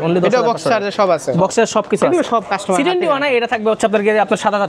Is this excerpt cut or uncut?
uncut